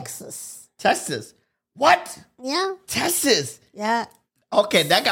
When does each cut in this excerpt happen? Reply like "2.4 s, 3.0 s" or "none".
none